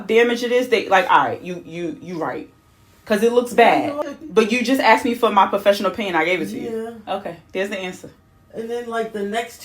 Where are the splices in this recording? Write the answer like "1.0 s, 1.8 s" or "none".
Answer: 4.0 s